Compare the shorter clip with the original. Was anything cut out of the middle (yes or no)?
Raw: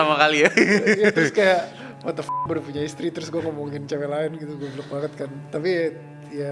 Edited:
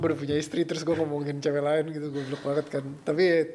no